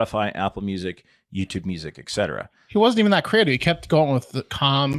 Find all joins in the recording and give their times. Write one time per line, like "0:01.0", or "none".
none